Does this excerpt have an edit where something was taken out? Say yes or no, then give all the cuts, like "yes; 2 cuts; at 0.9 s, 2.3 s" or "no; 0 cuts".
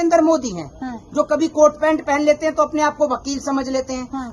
no; 0 cuts